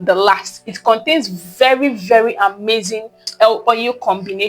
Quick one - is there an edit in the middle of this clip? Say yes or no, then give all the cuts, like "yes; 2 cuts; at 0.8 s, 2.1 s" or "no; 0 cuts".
yes; 1 cut; at 3.2 s